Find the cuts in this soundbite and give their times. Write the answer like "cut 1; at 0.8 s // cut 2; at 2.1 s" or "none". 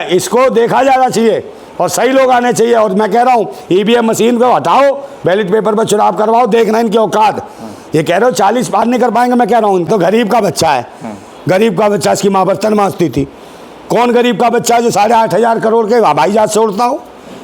cut 1; at 9.9 s